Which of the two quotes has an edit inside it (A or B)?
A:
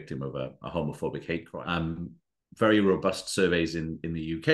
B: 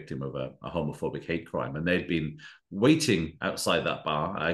A